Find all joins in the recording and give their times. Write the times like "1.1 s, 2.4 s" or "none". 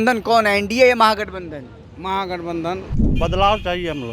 2.9 s

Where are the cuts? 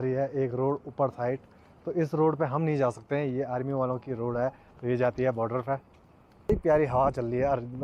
6.5 s

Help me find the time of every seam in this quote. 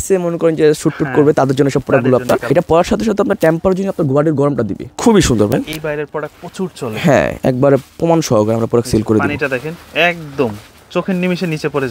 2.4 s, 4.9 s, 7.4 s

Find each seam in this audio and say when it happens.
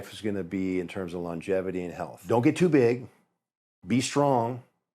2.1 s

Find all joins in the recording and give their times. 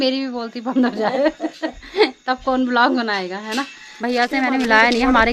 3.8 s

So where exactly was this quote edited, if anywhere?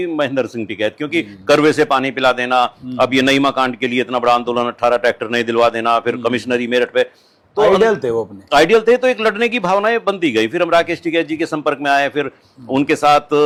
none

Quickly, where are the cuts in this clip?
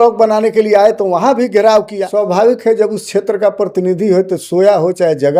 2.0 s

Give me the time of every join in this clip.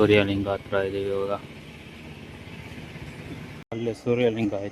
3.7 s

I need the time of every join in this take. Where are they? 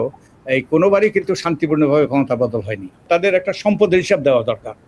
3.0 s

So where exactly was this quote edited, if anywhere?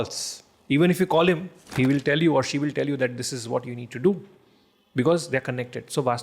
1.6 s

